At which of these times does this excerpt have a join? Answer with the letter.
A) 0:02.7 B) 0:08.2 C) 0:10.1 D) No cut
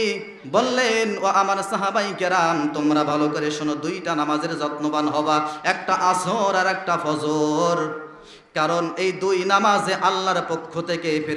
D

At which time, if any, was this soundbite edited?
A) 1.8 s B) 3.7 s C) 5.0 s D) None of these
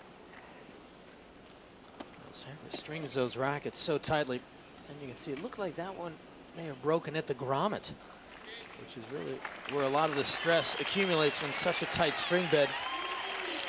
D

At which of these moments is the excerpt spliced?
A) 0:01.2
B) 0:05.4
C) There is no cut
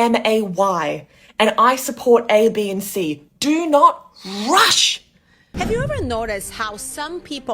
B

